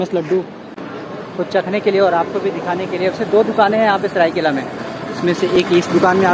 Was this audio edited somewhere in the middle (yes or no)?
no